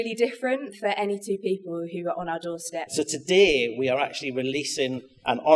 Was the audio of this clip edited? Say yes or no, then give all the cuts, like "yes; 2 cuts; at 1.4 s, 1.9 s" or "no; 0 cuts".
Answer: yes; 1 cut; at 2.9 s